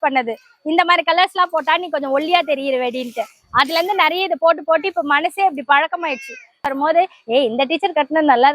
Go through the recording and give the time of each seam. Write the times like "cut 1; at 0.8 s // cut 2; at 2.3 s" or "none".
cut 1; at 6.6 s